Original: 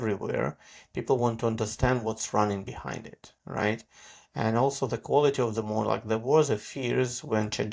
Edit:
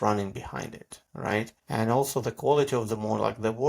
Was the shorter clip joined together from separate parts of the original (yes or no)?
yes